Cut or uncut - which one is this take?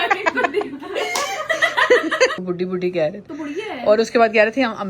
cut